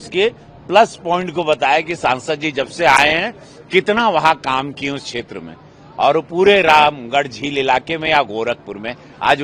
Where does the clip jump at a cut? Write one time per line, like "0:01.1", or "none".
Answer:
none